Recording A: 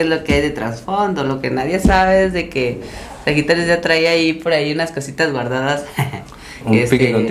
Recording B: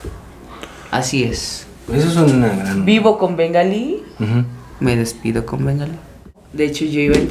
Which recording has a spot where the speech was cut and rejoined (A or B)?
B